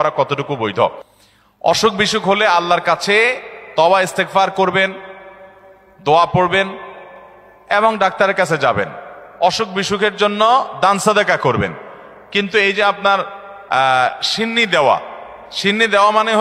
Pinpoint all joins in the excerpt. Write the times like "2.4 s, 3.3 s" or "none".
none